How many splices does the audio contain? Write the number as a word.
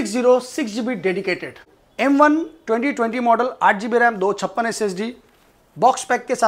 one